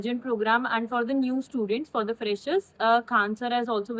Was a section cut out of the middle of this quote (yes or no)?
no